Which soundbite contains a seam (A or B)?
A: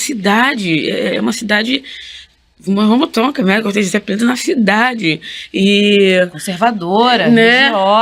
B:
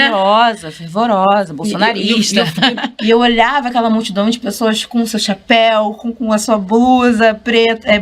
B